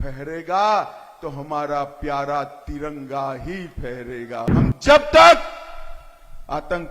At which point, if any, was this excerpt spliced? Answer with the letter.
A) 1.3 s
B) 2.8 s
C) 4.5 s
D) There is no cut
C